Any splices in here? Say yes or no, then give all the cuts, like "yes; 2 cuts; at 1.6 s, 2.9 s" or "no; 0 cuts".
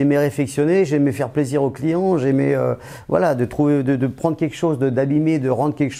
no; 0 cuts